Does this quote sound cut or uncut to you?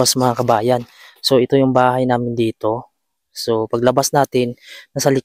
uncut